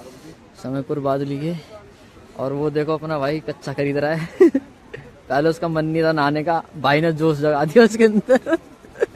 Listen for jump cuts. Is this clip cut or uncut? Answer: uncut